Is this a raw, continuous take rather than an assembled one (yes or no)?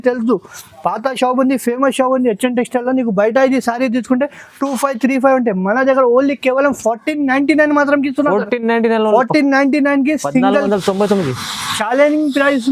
yes